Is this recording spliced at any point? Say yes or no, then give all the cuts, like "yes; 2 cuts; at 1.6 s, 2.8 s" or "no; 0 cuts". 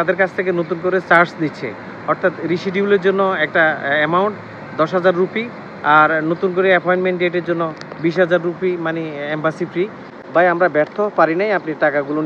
yes; 1 cut; at 10.1 s